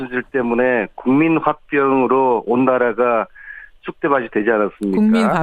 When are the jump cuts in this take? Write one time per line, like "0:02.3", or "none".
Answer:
0:01.0